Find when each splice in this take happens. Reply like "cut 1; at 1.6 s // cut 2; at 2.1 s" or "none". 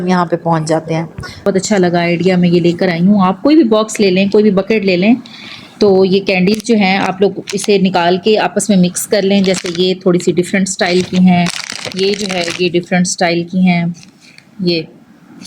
cut 1; at 1.5 s